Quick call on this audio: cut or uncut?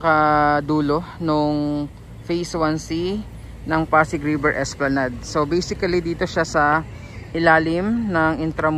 uncut